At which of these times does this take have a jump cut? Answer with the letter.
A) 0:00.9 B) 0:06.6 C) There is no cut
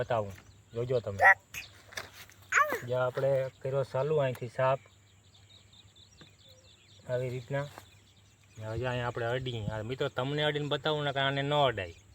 A